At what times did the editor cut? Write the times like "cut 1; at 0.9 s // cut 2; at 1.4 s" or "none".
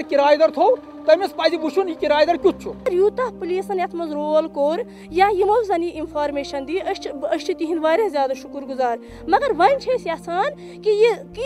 cut 1; at 2.8 s